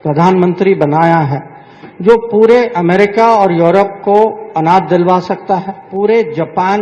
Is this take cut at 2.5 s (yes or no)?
no